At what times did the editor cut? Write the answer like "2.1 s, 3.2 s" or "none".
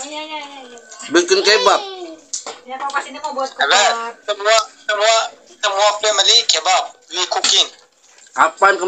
none

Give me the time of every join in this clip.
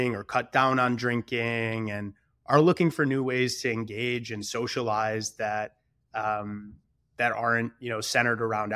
none

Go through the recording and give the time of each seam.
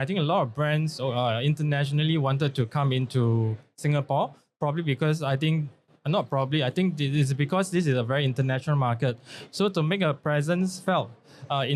none

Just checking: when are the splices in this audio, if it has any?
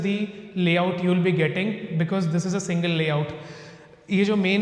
none

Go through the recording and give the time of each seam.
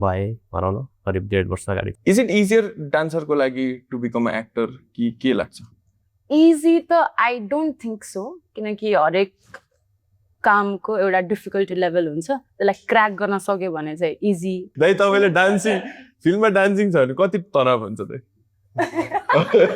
1.9 s, 14.7 s

